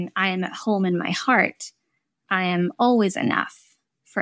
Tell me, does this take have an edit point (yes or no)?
no